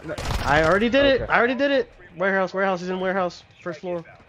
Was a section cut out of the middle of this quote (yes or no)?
no